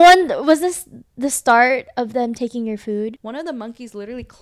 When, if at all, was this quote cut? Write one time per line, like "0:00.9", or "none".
0:03.2